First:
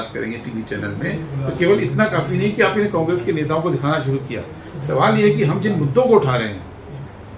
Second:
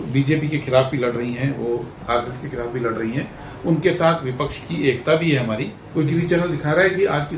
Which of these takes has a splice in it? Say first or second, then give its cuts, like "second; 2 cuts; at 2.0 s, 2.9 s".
second; 1 cut; at 5.8 s